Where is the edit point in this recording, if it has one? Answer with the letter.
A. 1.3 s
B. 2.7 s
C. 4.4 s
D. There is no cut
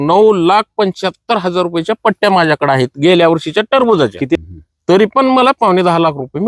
C